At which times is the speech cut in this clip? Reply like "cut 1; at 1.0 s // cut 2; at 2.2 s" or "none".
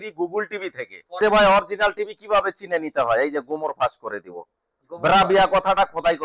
cut 1; at 1.2 s

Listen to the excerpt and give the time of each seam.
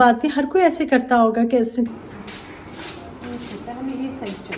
cut 1; at 1.9 s

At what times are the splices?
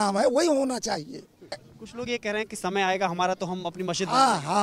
cut 1; at 1.7 s

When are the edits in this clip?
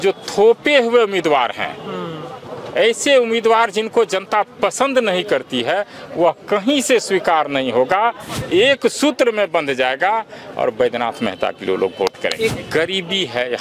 cut 1; at 8.3 s // cut 2; at 12.5 s

